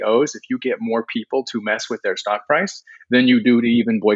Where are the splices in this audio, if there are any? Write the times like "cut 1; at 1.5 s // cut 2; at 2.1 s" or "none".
none